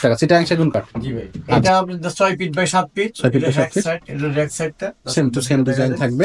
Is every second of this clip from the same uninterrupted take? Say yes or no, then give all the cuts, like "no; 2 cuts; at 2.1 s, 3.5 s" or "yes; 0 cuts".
no; 1 cut; at 1.6 s